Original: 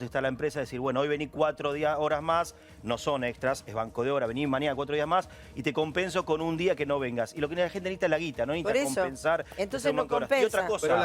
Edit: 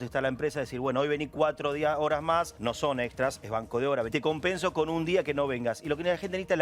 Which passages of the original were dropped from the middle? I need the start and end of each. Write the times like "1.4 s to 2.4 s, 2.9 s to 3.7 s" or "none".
2.5 s to 2.8 s, 4.3 s to 5.6 s